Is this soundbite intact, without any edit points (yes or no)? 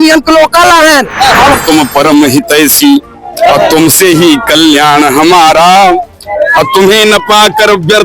no